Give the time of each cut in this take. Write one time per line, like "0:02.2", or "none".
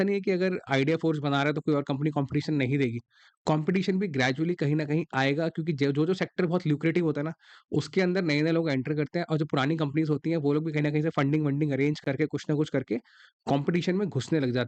none